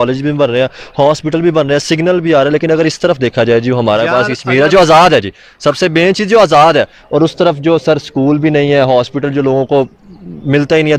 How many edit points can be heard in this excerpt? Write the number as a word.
zero